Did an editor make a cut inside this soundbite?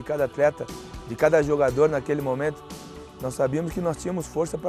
no; 0 cuts

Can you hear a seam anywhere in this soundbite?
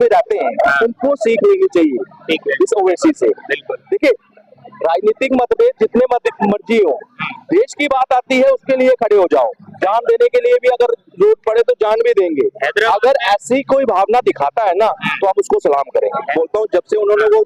no; 0 cuts

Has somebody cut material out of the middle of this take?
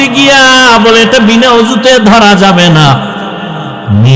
no; 0 cuts

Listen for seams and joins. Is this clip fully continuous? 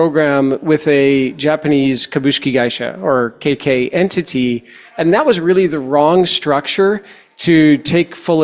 yes; 0 cuts

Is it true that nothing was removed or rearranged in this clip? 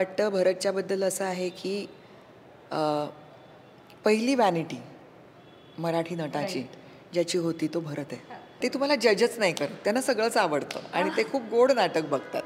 no; 1 cut; at 8.6 s

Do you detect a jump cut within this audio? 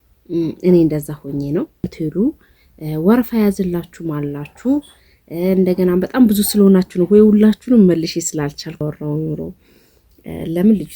yes; 2 cuts; at 1.9 s, 8.8 s

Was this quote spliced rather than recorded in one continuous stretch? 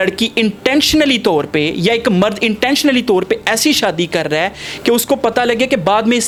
no; 0 cuts

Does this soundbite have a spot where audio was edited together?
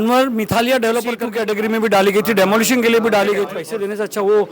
yes; 2 cuts; at 1.3 s, 3.6 s

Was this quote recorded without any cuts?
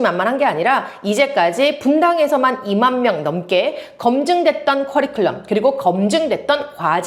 yes; 0 cuts

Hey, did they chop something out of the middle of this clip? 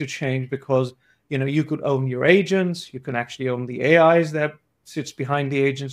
no; 0 cuts

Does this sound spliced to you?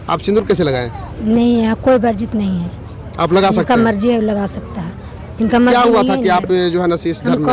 no; 0 cuts

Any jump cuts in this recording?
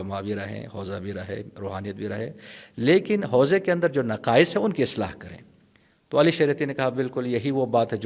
no; 0 cuts

